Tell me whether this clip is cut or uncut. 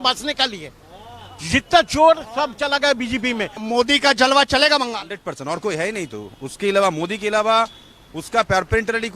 cut